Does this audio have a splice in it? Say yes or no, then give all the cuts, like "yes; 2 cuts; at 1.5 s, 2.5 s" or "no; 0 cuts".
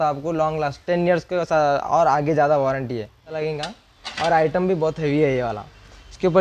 yes; 1 cut; at 3.3 s